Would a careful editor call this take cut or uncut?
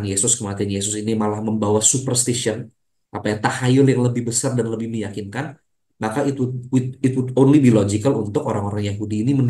uncut